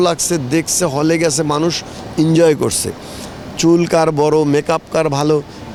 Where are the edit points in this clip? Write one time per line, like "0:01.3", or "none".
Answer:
none